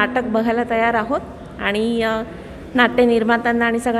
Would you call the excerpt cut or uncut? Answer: uncut